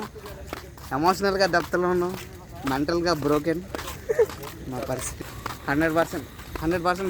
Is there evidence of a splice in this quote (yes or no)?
yes